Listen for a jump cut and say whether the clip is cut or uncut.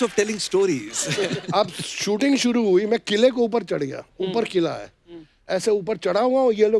cut